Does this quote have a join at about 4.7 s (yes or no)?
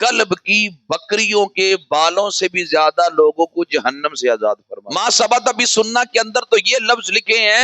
yes